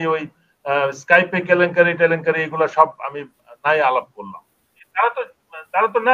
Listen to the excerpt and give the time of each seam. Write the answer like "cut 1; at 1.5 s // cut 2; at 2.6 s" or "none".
cut 1; at 4.7 s